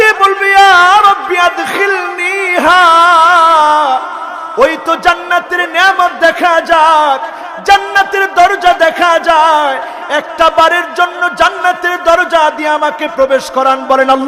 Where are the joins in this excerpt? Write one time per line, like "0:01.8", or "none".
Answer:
none